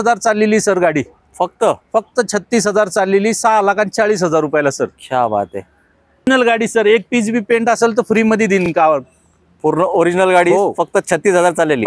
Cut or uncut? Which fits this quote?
uncut